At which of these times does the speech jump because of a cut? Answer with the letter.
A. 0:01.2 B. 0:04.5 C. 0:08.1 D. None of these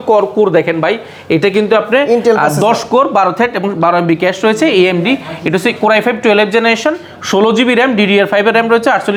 D